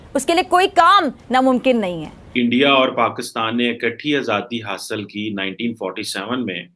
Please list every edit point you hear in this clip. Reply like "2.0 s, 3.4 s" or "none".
2.0 s